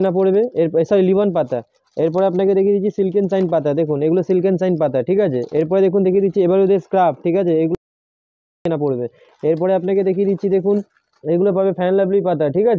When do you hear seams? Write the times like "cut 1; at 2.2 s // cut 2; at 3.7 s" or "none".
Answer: none

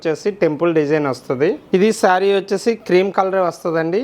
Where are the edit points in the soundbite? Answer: cut 1; at 1.6 s

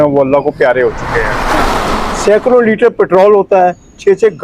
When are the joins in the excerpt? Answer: cut 1; at 1.7 s

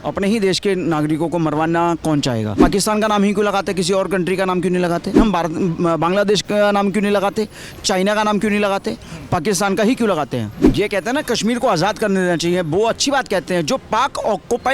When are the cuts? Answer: cut 1; at 2.6 s // cut 2; at 5.2 s // cut 3; at 10.6 s

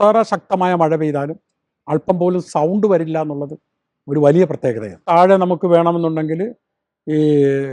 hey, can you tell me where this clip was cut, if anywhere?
cut 1; at 5.0 s

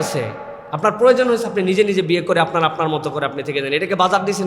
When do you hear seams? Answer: none

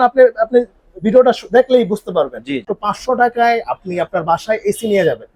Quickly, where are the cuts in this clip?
cut 1; at 2.4 s

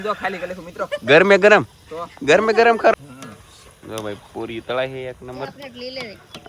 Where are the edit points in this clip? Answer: cut 1; at 2.9 s

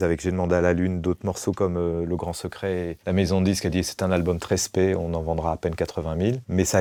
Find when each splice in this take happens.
none

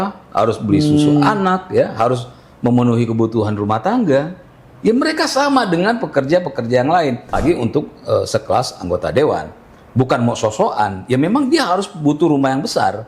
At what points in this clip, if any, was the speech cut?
cut 1; at 7.3 s

